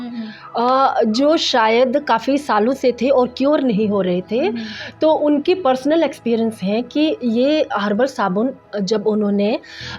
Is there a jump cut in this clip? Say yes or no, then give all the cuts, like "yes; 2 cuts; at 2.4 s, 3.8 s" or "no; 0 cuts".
no; 0 cuts